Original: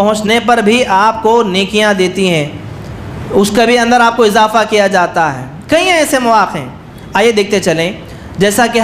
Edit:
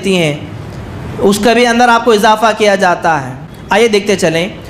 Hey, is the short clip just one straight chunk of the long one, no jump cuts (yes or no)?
no